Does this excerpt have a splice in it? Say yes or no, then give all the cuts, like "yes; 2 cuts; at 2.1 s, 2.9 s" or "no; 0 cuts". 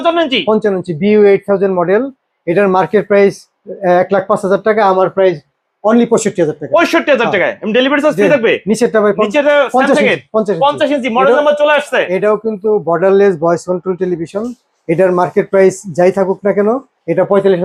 no; 0 cuts